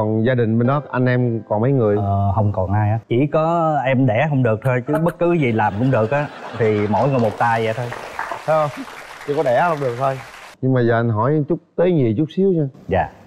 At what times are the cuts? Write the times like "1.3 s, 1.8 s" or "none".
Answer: 3.0 s, 10.5 s